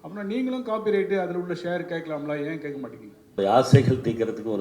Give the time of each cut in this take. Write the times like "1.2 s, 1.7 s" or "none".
3.4 s